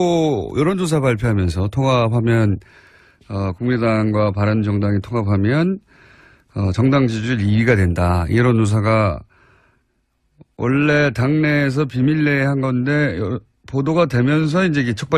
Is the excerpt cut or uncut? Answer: cut